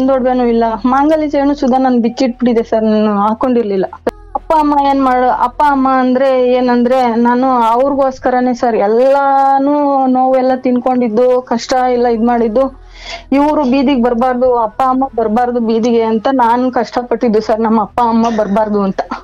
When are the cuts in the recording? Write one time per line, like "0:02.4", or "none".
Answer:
0:04.2